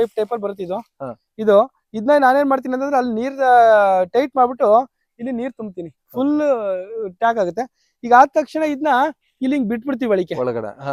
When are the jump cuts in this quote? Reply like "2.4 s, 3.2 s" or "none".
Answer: none